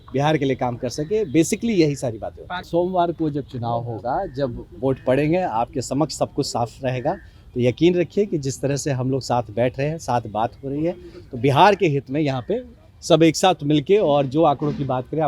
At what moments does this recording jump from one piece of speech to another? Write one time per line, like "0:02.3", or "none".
0:02.6